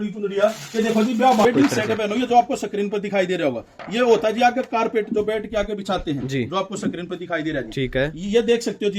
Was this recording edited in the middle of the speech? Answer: yes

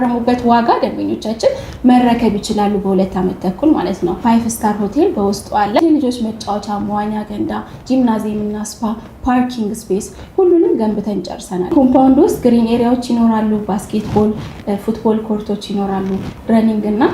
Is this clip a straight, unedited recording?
no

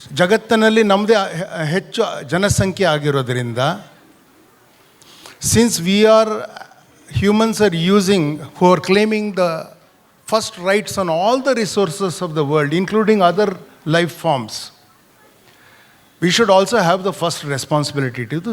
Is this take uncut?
yes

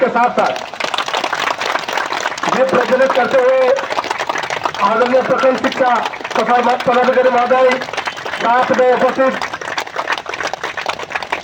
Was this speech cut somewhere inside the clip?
no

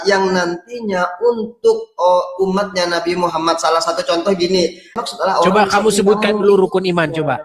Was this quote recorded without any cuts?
no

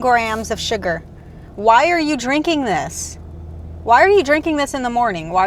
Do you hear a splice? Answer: no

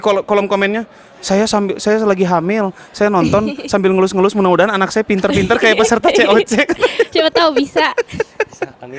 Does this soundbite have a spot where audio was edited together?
no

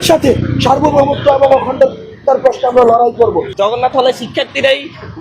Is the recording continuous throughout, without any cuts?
no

